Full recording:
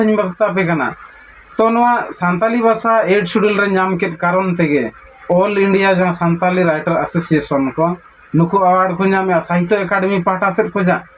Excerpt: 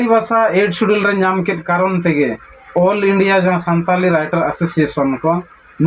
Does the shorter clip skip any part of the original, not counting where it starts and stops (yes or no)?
no